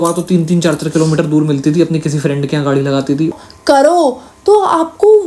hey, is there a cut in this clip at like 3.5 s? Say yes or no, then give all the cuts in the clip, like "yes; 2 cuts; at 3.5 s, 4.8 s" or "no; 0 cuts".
yes; 1 cut; at 3.5 s